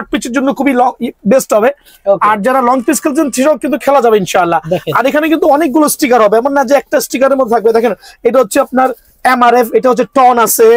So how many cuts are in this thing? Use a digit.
0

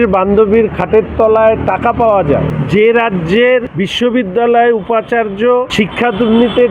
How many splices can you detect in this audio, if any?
3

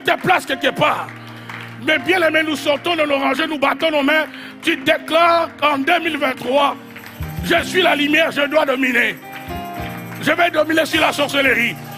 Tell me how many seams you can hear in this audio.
0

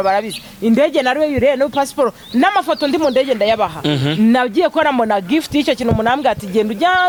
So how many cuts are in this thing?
0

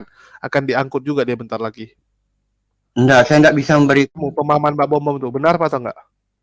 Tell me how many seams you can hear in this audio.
1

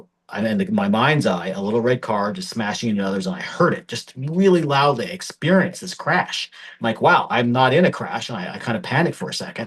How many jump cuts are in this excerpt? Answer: 0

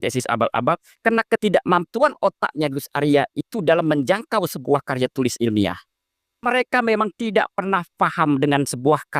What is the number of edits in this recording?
1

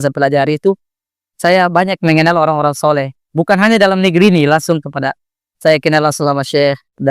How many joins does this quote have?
0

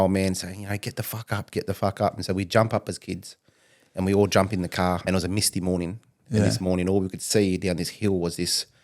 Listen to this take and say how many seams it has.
1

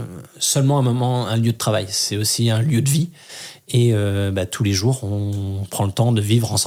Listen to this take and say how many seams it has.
0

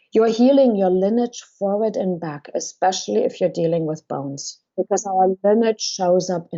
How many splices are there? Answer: 1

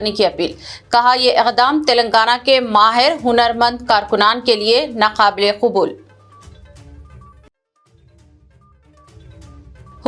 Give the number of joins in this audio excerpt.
0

